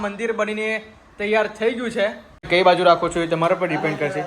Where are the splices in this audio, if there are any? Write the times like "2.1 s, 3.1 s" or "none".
2.5 s